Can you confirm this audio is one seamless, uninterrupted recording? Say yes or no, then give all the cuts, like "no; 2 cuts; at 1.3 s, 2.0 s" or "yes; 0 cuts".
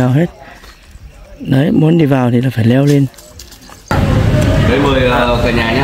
no; 1 cut; at 3.9 s